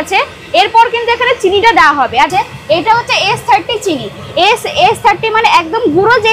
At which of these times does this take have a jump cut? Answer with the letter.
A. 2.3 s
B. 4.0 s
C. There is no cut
A